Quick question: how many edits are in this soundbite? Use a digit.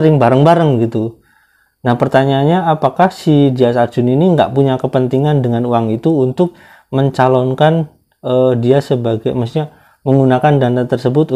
0